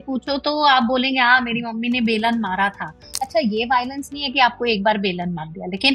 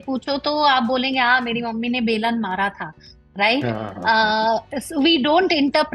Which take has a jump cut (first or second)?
first